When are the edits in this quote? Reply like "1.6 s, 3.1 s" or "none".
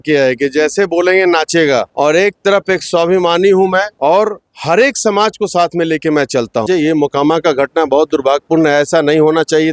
1.9 s, 3.9 s, 6.6 s